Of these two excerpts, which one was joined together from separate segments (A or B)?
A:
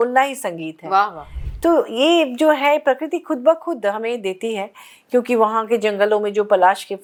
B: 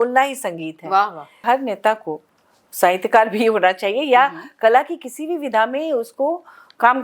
B